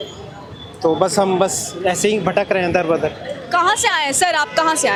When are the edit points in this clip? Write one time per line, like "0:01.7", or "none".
none